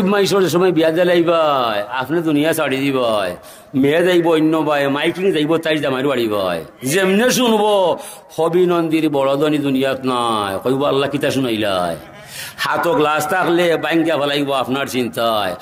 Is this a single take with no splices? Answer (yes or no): yes